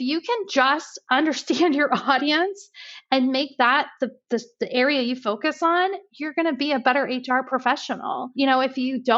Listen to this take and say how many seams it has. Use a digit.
2